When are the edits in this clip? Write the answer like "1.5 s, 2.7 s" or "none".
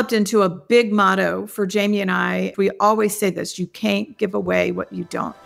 2.5 s